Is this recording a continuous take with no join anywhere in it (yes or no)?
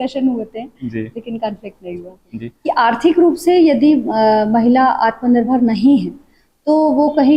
no